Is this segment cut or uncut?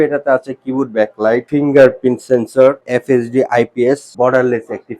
cut